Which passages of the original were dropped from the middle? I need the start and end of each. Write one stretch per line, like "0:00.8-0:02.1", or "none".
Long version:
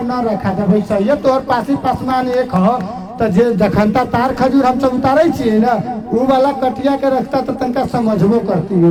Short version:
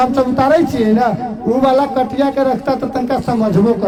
none